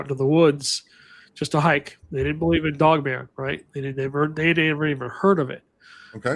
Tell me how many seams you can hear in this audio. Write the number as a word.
zero